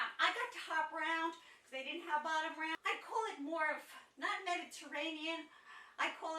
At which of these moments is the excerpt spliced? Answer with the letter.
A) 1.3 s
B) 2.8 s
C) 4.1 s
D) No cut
B